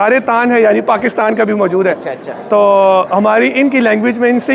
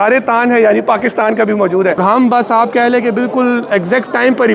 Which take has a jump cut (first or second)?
second